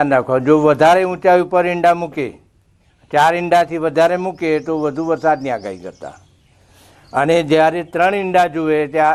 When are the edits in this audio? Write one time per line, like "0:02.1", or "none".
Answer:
none